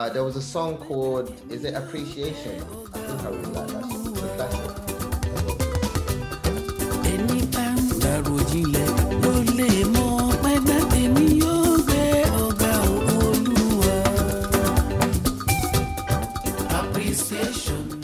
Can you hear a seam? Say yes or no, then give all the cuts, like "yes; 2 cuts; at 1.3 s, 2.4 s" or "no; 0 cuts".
no; 0 cuts